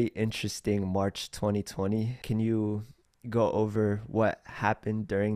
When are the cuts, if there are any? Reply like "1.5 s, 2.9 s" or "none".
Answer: none